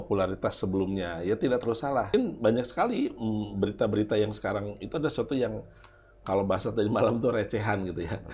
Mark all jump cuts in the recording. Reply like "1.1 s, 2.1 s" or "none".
2.1 s

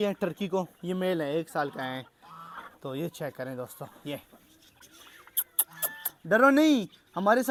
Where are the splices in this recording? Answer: none

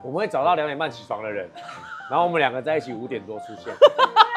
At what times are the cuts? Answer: none

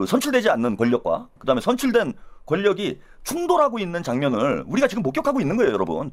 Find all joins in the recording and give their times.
1.3 s

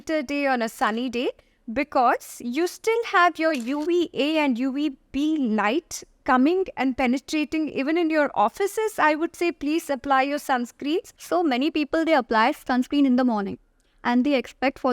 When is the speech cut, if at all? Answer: 11.1 s, 12.7 s

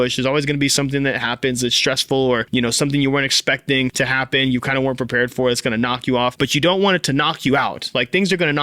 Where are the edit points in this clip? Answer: 2.5 s, 3.9 s, 6.3 s

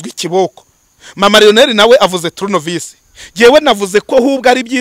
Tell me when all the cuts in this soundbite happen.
none

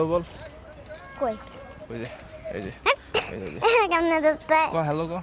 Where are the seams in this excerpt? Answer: none

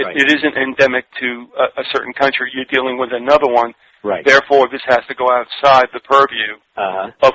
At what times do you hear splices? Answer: 4.7 s

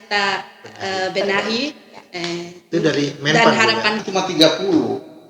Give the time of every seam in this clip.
4.0 s

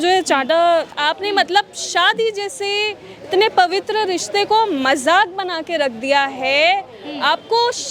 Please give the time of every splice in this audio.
1.0 s

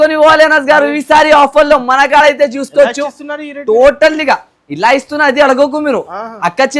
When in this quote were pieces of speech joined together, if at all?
none

